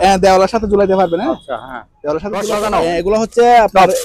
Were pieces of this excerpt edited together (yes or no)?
yes